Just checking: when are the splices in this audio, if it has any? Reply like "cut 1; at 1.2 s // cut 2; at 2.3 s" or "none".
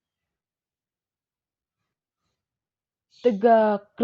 cut 1; at 2.9 s